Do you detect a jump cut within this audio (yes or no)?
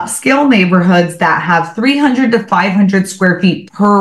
no